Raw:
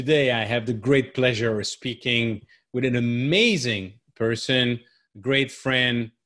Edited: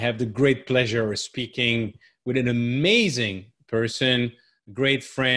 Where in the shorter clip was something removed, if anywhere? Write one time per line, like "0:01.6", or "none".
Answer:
none